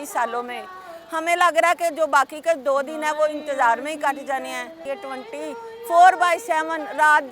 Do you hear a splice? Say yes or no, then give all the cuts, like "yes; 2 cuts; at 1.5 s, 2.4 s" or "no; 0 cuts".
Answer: yes; 1 cut; at 4.8 s